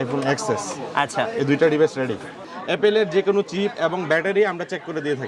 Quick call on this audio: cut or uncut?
cut